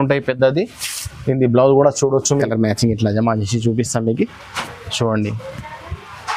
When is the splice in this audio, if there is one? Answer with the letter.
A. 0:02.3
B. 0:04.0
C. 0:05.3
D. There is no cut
A